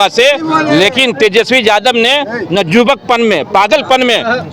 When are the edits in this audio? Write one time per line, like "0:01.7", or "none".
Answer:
none